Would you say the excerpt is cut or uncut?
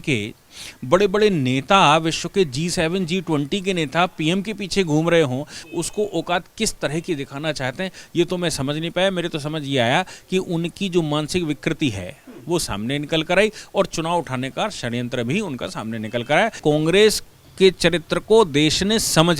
cut